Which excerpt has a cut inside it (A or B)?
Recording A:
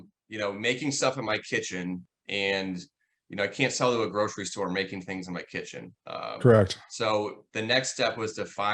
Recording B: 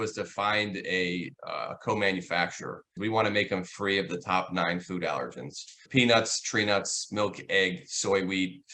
B